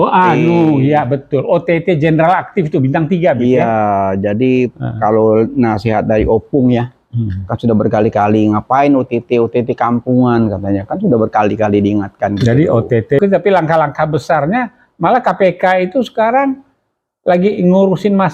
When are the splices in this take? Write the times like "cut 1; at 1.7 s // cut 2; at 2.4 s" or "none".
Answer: cut 1; at 13.2 s